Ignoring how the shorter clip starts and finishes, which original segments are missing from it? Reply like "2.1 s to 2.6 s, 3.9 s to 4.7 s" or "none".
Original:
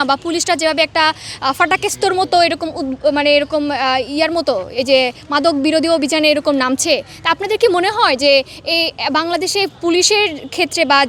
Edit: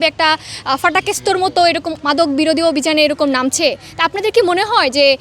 2.7 s to 5.2 s